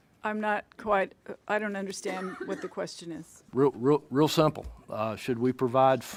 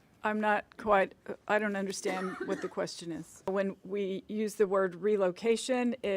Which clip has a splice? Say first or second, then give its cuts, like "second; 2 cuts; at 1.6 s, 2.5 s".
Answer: second; 1 cut; at 3.5 s